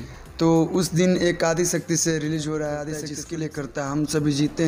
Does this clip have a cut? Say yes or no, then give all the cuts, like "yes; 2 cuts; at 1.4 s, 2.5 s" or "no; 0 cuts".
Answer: yes; 1 cut; at 3.1 s